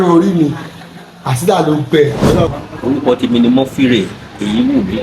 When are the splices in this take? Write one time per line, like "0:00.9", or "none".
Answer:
0:02.5